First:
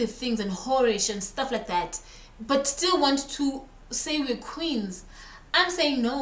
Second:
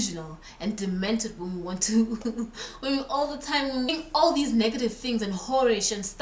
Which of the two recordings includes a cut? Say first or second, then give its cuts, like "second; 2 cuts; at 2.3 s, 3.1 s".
second; 1 cut; at 3.9 s